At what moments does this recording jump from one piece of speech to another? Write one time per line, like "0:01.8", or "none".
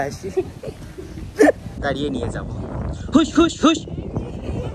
0:01.7